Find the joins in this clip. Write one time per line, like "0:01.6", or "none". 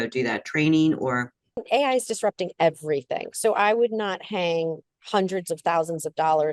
0:01.6